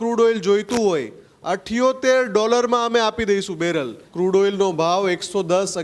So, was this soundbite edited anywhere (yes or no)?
yes